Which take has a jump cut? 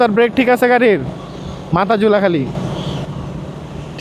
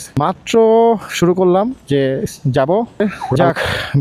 second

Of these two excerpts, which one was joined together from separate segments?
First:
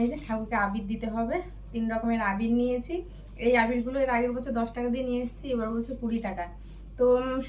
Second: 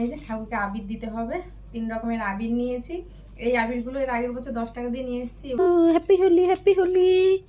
second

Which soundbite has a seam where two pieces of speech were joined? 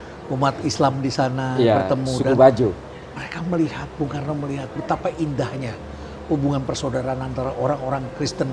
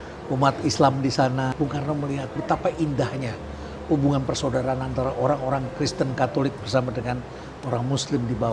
second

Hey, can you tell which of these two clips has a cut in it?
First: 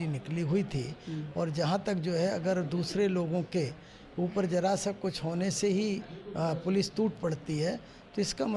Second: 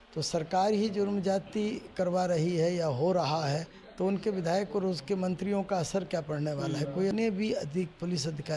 second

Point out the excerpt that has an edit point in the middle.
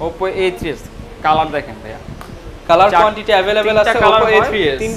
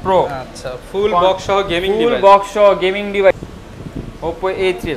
second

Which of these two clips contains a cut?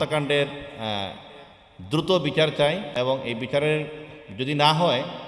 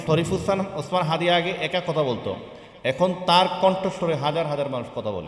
first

